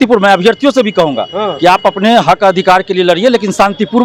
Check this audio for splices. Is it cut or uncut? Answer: uncut